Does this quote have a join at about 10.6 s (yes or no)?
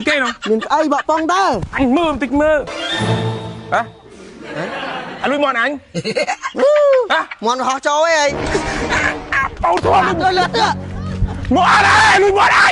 no